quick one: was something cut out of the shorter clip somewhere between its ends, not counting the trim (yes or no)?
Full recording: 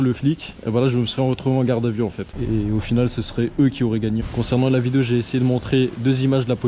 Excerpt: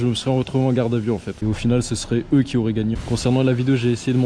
yes